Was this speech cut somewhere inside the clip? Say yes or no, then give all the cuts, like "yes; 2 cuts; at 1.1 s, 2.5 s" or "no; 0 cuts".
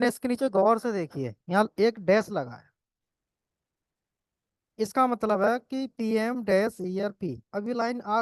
no; 0 cuts